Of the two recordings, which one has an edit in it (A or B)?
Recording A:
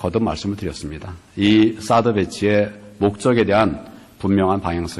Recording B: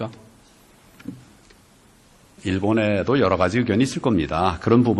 A